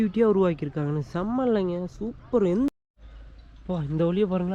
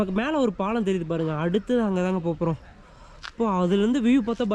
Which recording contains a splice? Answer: first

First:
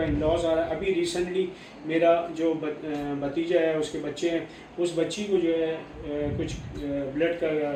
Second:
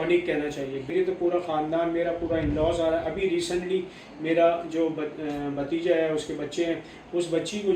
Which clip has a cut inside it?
second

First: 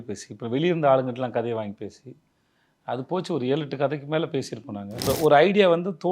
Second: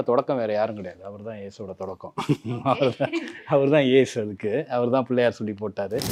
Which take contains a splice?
first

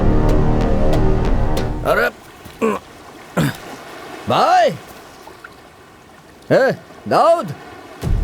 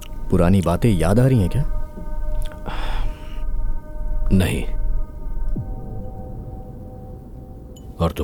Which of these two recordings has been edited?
first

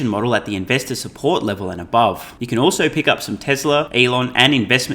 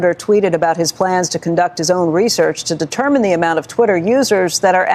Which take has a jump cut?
first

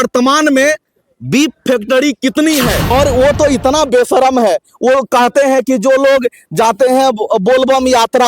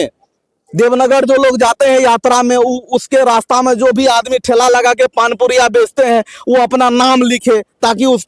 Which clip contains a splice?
first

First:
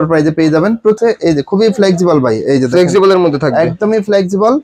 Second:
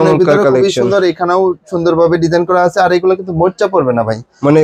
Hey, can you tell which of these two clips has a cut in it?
first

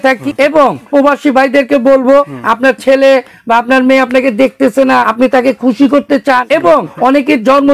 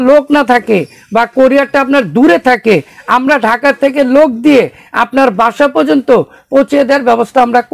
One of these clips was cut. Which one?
first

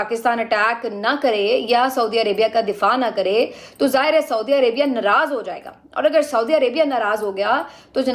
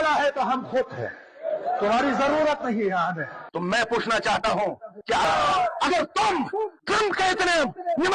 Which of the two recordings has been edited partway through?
second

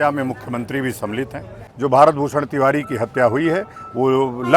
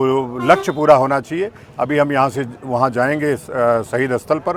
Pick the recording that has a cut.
first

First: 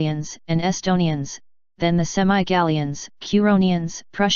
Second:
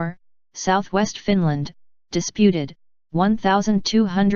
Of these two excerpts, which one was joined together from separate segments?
first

